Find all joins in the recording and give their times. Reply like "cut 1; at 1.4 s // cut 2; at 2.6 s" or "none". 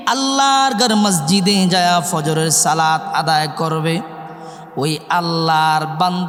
none